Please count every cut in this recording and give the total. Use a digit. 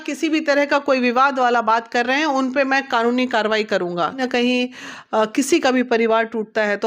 1